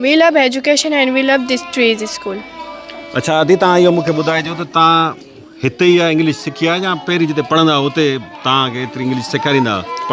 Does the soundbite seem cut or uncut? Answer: uncut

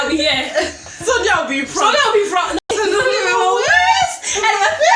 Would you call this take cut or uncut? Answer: cut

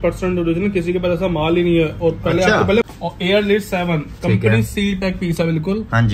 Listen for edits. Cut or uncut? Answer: cut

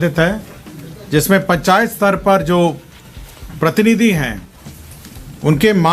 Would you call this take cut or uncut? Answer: uncut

